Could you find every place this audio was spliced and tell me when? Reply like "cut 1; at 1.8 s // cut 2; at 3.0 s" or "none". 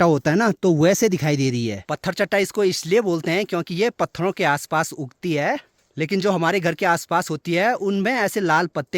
none